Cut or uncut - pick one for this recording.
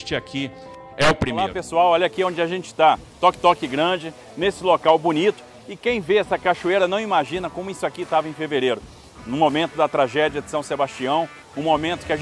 cut